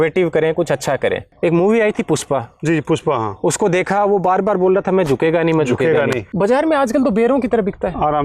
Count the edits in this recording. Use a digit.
2